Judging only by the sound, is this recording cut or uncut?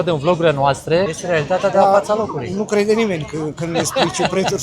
cut